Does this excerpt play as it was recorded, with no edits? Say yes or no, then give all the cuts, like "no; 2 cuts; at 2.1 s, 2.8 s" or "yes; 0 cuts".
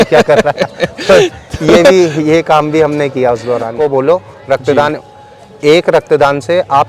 no; 1 cut; at 3.7 s